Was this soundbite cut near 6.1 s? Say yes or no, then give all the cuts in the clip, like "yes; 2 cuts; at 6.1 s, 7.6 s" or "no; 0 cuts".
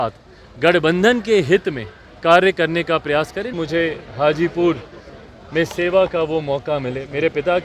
no; 1 cut; at 3.5 s